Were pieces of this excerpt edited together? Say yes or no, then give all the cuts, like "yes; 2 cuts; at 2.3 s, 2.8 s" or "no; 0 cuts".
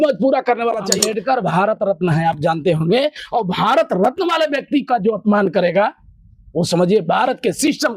yes; 1 cut; at 0.9 s